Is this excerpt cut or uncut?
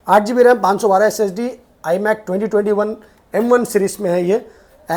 uncut